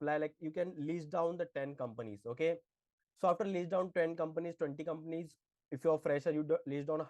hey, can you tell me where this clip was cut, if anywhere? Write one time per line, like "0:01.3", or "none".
none